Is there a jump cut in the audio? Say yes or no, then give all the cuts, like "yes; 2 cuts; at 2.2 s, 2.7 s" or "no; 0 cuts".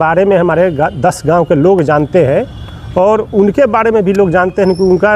no; 0 cuts